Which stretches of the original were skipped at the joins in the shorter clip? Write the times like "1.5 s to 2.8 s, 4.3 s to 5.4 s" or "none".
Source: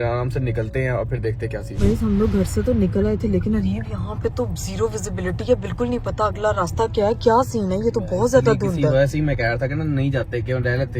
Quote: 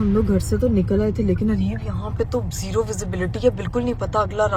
none